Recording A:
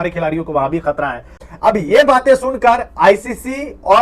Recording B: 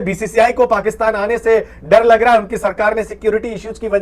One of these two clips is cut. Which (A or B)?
A